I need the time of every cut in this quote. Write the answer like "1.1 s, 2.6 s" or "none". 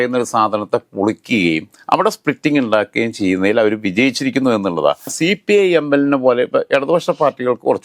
5.1 s